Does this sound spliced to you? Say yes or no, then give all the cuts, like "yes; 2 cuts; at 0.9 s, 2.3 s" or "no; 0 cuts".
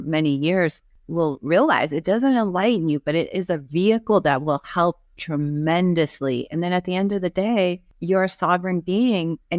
yes; 2 cuts; at 1.0 s, 7.9 s